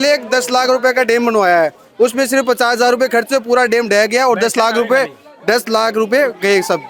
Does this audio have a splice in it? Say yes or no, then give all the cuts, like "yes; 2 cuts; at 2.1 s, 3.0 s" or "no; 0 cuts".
no; 0 cuts